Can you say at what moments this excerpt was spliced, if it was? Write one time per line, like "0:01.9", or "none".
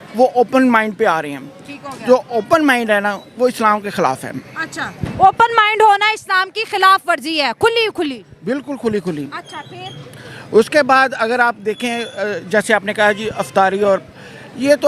none